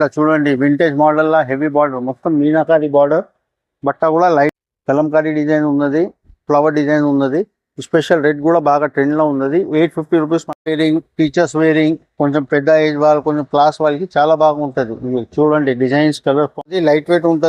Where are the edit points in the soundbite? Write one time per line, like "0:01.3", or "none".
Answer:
0:04.5
0:10.5
0:16.6